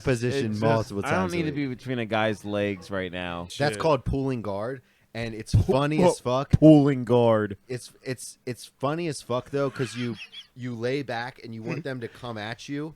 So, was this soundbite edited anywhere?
yes; 1 cut; at 3.5 s

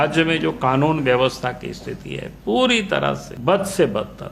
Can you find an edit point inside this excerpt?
yes; 1 cut; at 3.3 s

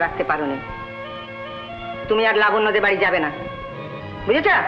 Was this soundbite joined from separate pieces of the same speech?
no; 0 cuts

